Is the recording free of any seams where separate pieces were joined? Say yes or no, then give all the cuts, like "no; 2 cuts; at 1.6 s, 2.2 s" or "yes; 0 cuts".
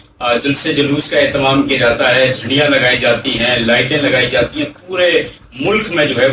yes; 0 cuts